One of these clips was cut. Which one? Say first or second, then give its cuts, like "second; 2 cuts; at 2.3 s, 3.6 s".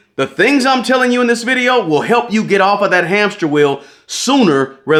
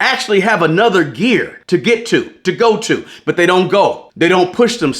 second; 2 cuts; at 1.6 s, 4.1 s